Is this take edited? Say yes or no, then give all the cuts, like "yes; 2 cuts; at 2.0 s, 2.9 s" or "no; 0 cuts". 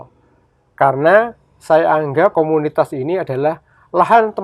yes; 1 cut; at 2.3 s